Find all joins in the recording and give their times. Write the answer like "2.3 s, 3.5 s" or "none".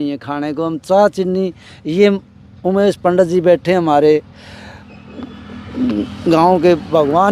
none